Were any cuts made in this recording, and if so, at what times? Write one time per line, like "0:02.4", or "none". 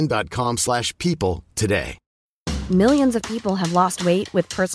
0:02.0